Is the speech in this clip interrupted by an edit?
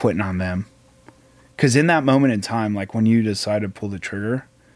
no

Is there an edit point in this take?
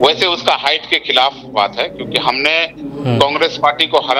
no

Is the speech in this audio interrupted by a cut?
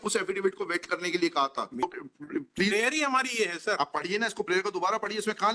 yes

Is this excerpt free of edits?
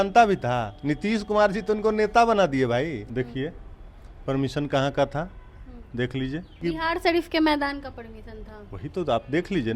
no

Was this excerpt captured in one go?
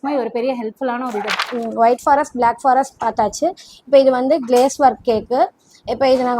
no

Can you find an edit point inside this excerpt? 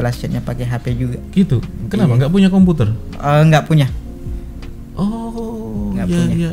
no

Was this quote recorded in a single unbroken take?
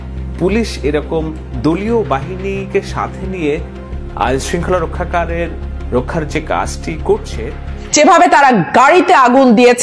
no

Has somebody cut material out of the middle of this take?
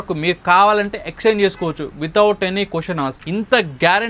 yes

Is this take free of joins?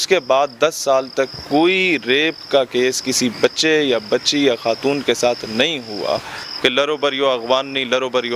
no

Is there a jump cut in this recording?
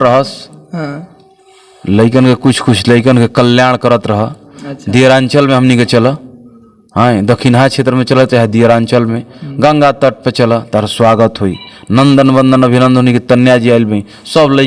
no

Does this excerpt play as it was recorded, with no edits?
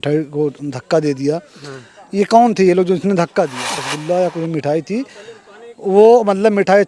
no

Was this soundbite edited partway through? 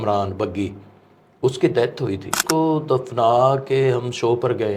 yes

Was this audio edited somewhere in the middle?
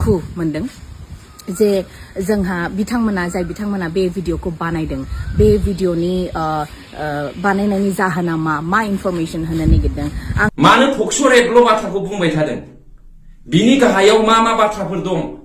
yes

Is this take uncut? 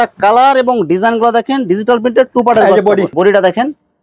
yes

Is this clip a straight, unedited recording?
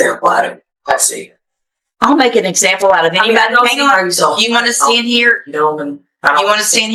yes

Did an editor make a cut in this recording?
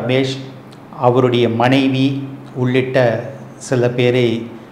no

